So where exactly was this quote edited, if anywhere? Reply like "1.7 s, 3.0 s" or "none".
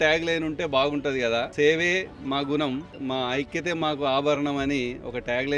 1.5 s, 2.9 s